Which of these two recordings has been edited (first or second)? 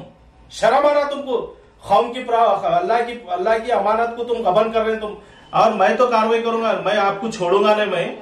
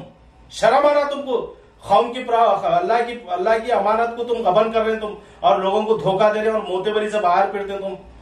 first